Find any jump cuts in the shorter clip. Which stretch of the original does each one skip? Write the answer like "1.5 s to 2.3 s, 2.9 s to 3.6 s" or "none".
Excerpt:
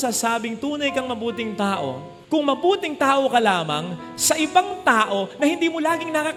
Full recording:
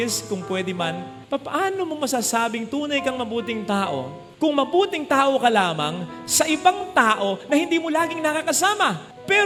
none